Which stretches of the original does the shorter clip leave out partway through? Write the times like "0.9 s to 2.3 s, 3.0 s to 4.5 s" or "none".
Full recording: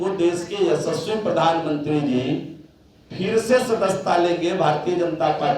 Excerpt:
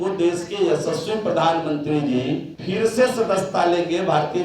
2.5 s to 3.1 s